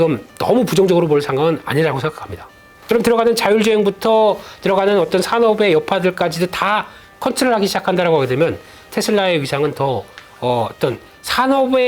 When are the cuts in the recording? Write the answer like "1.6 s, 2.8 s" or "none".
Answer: 2.7 s